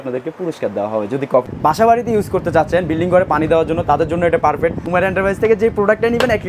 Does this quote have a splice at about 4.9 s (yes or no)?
yes